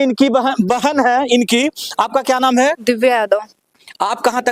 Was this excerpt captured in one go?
yes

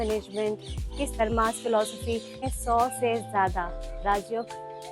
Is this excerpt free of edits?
no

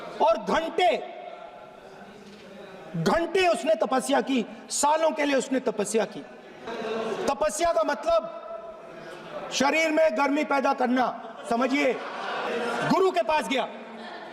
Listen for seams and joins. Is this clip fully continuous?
no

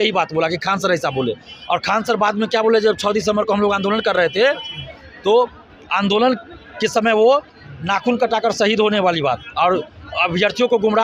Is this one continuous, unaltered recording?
yes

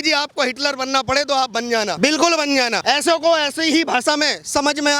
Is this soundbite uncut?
no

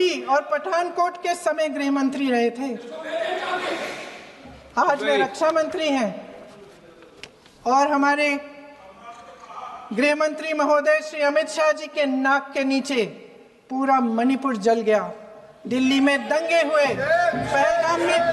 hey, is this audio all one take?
yes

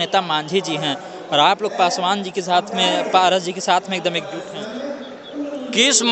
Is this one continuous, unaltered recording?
yes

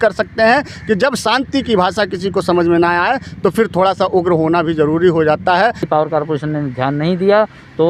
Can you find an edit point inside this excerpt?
yes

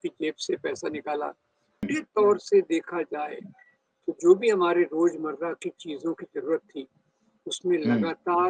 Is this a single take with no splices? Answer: no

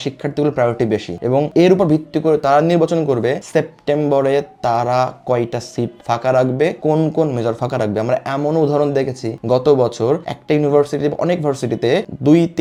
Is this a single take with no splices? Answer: yes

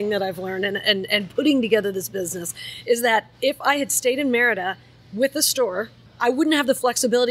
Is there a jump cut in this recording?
yes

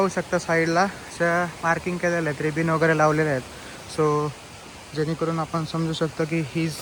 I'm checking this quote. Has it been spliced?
no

